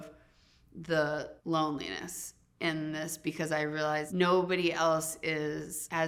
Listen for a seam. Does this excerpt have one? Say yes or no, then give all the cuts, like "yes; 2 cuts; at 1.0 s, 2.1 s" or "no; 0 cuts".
no; 0 cuts